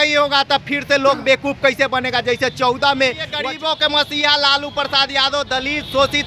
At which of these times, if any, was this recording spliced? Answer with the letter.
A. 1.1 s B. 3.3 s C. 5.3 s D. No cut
B